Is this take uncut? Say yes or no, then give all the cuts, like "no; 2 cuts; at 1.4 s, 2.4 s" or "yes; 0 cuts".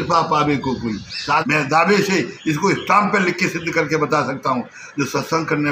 no; 1 cut; at 1.4 s